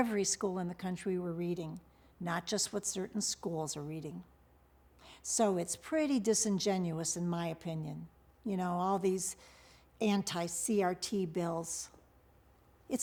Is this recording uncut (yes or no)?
yes